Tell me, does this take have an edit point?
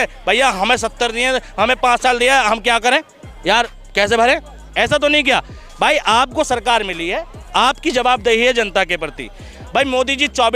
no; 0 cuts

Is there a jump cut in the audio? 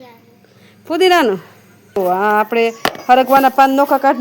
yes; 1 cut; at 2.0 s

